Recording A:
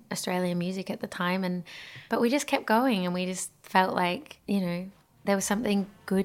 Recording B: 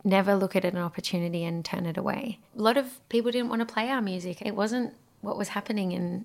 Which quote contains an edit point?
B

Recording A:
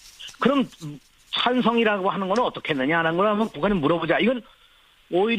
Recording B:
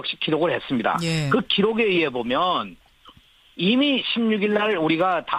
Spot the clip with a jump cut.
B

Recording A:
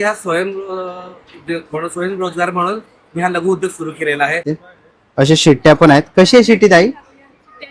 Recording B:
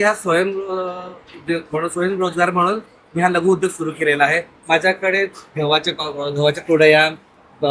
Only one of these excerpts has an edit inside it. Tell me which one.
A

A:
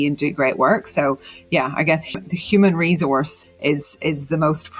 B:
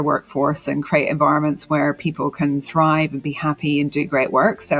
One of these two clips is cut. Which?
A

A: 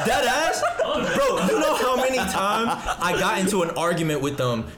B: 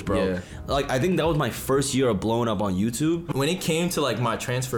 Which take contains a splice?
B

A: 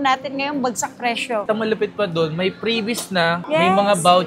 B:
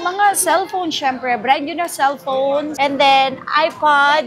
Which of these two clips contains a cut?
A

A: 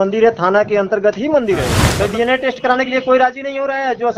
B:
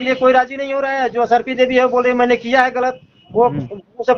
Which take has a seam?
A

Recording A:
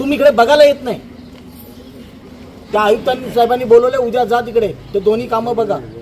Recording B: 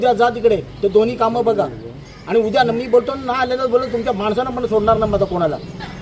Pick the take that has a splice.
A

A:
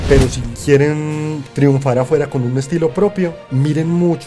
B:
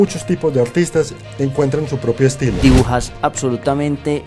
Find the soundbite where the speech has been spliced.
B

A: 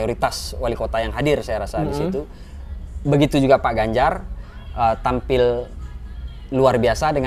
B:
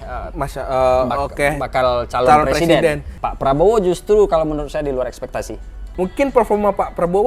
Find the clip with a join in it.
B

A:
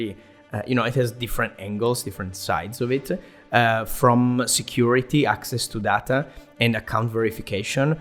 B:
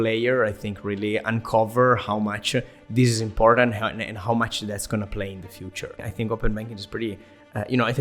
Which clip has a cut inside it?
B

